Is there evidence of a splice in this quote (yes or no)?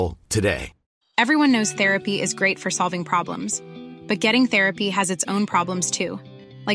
no